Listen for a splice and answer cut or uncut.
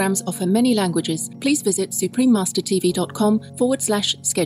cut